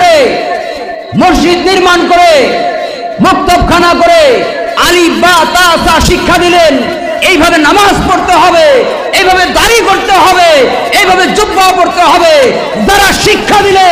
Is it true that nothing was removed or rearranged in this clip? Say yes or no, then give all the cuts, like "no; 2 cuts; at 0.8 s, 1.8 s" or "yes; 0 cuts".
yes; 0 cuts